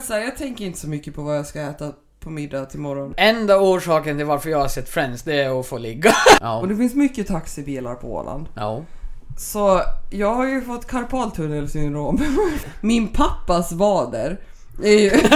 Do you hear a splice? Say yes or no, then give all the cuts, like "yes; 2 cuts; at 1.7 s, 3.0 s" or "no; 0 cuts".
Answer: yes; 3 cuts; at 3.1 s, 6.4 s, 12.7 s